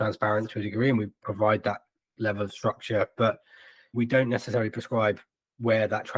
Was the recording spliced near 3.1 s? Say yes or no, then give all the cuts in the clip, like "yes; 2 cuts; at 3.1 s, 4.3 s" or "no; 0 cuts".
yes; 1 cut; at 3.1 s